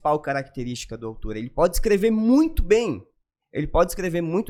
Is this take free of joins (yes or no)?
yes